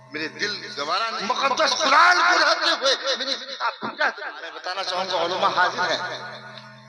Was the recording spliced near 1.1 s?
yes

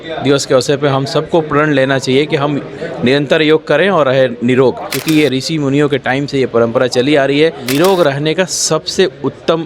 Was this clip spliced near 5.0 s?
yes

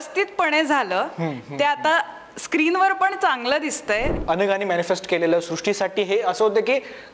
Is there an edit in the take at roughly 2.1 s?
no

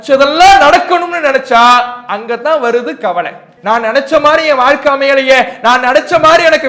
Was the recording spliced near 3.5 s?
yes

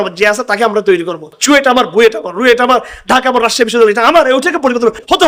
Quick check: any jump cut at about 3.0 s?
no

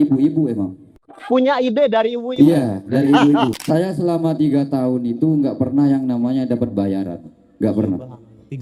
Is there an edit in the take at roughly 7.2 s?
no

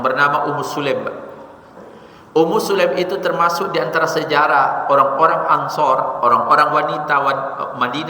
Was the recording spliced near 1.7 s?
yes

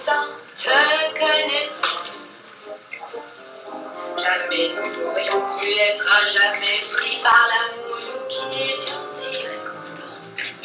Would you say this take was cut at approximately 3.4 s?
no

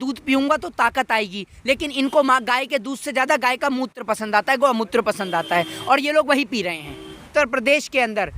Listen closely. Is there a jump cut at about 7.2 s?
yes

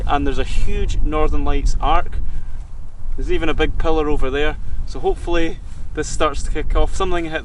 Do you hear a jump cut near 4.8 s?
no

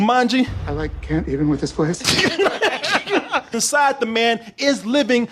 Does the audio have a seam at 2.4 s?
no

